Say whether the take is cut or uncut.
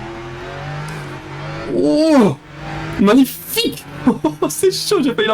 uncut